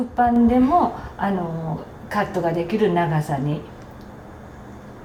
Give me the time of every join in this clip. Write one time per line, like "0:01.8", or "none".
none